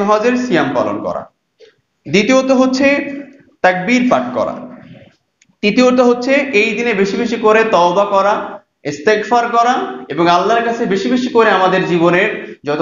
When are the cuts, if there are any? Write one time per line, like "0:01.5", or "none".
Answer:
none